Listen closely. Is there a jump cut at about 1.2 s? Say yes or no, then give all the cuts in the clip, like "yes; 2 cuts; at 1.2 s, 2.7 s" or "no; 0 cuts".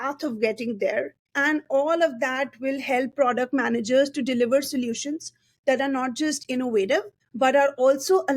yes; 2 cuts; at 1.2 s, 7.2 s